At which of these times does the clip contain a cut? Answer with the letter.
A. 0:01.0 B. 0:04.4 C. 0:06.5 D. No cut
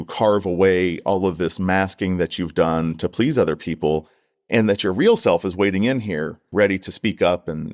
C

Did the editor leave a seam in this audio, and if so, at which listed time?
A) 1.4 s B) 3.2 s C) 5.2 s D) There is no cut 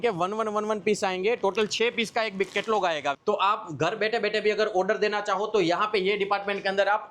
B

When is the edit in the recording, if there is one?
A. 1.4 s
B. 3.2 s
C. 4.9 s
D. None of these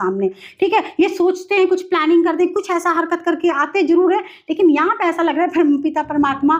D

